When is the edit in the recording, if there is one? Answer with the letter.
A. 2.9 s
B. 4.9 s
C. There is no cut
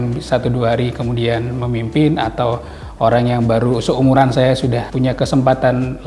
B